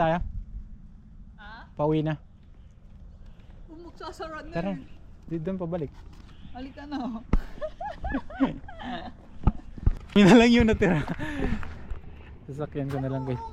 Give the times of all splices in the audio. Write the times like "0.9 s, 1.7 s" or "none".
10.2 s